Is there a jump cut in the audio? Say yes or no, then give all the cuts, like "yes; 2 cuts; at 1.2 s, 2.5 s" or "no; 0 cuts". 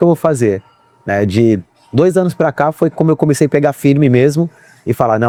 no; 0 cuts